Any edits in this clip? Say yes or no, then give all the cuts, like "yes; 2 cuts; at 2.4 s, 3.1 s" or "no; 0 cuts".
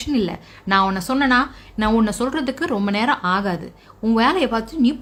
no; 0 cuts